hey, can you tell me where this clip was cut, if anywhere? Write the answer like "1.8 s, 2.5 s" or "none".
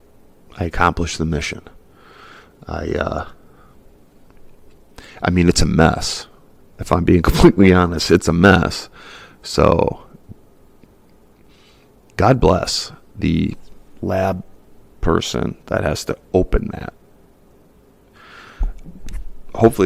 none